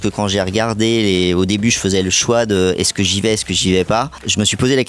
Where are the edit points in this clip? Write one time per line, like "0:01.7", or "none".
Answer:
none